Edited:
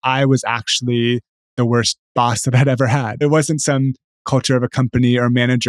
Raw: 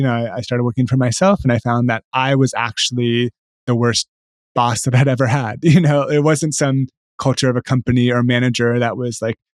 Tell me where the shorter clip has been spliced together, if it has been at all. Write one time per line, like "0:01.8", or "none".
0:02.0
0:03.2